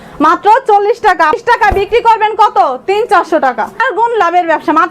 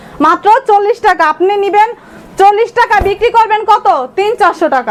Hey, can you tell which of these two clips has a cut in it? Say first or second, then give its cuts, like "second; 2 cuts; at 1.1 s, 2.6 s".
first; 2 cuts; at 1.4 s, 3.9 s